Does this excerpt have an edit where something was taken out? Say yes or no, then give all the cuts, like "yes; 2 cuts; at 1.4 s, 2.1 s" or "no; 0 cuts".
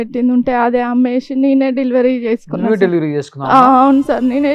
no; 0 cuts